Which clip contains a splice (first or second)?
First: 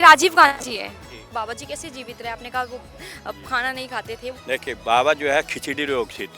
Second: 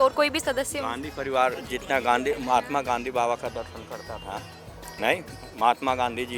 first